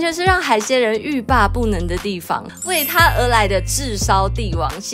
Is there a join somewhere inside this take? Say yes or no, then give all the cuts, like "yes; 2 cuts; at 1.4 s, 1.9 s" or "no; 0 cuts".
yes; 1 cut; at 2.4 s